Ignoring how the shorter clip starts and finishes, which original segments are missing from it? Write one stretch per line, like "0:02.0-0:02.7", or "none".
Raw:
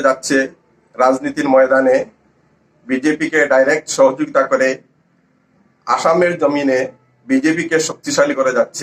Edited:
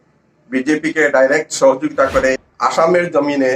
0:04.9-0:05.8

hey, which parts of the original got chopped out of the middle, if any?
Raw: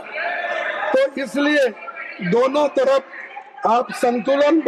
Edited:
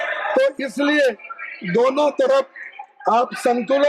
none

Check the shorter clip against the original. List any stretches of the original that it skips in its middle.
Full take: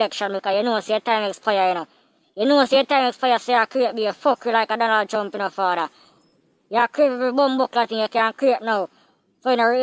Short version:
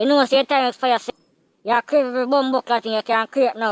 0:03.4-0:06.1

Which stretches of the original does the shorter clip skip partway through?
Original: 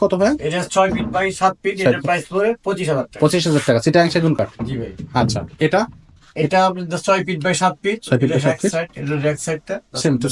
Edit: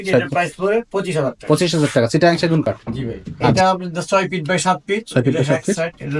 0:05.3-0:06.5

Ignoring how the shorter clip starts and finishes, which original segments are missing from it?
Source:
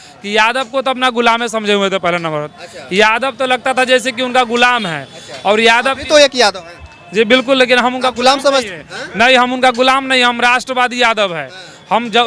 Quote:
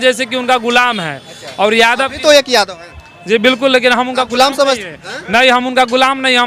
none

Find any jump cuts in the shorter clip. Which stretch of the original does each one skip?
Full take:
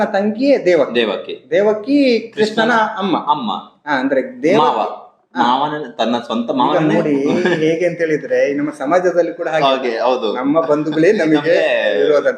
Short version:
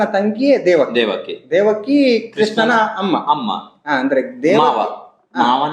none

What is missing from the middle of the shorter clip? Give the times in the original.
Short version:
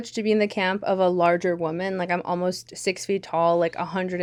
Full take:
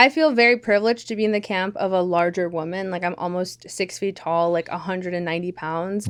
none

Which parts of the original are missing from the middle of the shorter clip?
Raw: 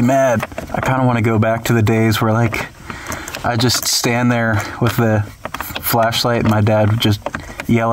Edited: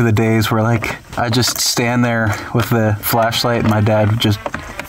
0:02.7-0:03.3
0:05.3-0:05.8

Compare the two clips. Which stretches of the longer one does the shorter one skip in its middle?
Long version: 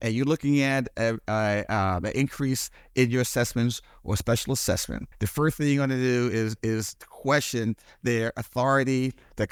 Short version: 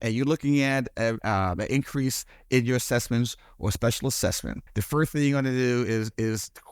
0:01.2-0:01.7

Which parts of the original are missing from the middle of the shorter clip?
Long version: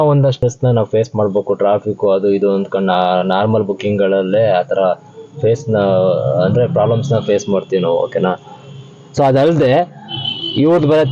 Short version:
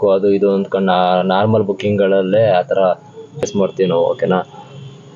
0:05.4-0:07.4

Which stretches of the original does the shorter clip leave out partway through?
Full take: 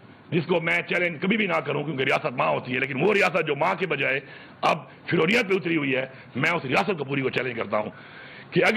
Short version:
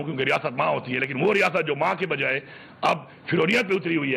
none

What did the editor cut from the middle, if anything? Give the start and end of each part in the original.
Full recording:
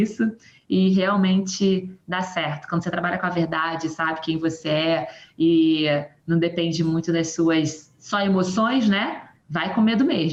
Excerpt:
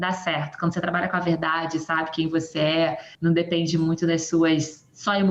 0:05.2-0:06.1

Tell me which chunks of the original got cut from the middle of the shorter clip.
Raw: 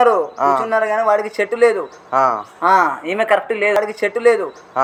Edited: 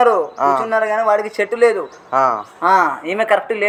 none

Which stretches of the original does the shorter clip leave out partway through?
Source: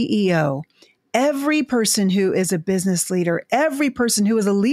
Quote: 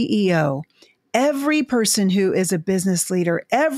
none

